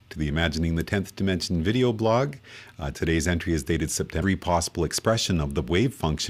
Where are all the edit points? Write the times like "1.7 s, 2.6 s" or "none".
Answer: none

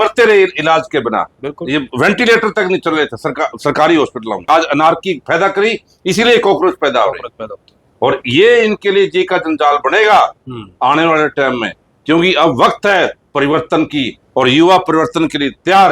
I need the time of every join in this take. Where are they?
4.5 s

